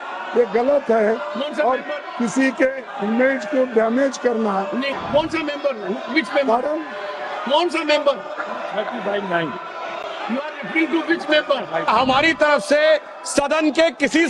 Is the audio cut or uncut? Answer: cut